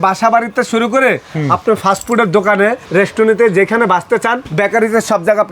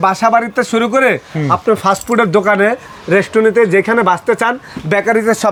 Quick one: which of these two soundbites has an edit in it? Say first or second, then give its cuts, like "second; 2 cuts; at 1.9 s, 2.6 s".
first; 2 cuts; at 2.8 s, 4.4 s